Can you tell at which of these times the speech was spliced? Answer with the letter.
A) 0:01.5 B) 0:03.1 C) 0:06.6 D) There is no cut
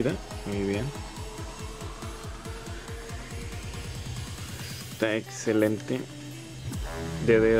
B